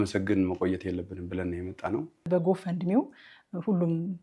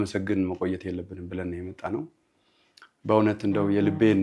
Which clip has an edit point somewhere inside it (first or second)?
first